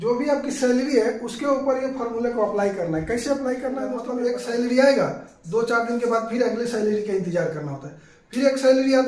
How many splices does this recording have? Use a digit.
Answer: 1